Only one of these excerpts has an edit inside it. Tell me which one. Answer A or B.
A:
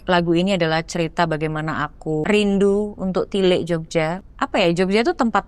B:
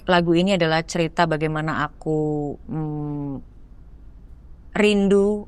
A